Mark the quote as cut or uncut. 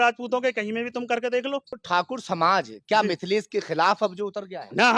cut